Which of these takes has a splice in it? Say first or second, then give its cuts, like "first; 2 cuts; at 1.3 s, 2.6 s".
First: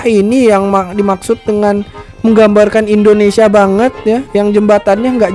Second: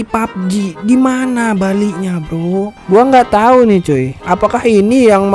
second; 1 cut; at 2.7 s